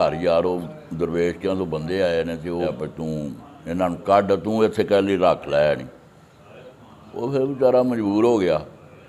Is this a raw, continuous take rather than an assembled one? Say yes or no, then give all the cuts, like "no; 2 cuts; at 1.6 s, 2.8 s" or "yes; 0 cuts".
no; 1 cut; at 2.7 s